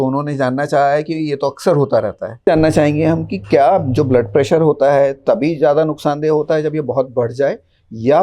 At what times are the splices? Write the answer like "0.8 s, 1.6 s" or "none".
2.4 s